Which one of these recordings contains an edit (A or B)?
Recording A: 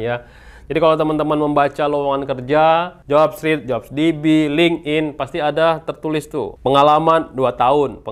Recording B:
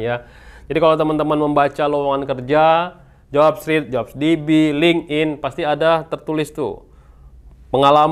A